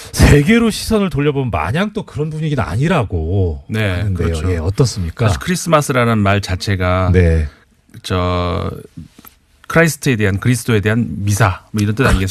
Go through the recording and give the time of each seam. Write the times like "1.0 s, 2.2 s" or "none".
none